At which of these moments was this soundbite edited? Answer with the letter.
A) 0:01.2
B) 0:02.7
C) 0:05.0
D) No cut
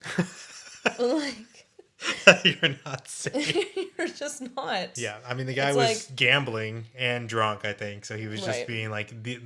C